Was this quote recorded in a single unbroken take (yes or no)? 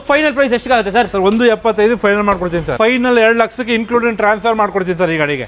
no